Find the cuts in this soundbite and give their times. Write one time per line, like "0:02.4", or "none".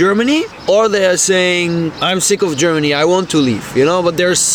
none